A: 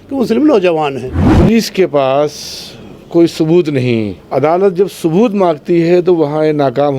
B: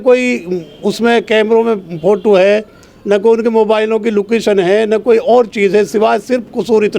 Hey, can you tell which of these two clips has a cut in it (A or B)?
A